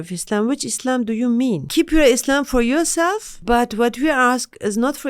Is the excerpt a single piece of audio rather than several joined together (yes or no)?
no